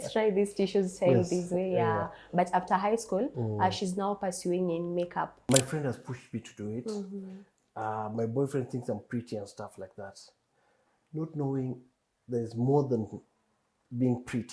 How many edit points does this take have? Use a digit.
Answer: 1